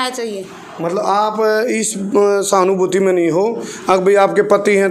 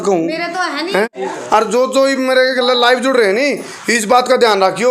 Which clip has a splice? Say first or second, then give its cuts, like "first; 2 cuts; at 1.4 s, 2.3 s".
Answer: second; 1 cut; at 1.2 s